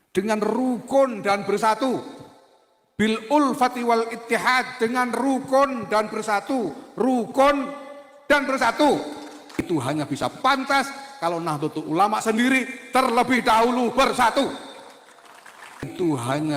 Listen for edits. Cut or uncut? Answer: cut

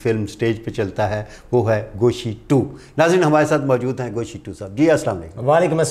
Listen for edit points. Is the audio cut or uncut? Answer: uncut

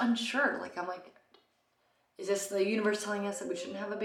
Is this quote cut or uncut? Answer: uncut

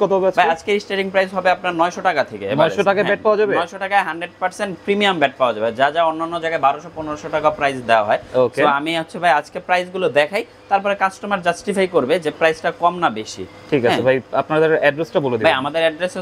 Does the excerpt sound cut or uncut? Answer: uncut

